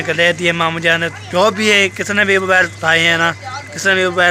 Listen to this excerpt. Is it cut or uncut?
uncut